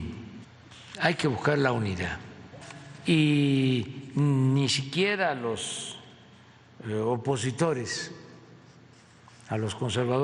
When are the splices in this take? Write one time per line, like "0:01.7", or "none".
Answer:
none